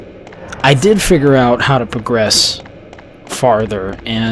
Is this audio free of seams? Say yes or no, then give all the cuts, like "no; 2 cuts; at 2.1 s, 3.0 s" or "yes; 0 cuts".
no; 1 cut; at 1.6 s